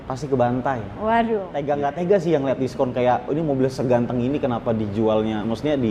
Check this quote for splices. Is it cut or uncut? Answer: cut